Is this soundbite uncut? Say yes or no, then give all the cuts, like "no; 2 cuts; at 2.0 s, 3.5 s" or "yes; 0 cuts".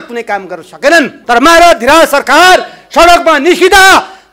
no; 1 cut; at 1.2 s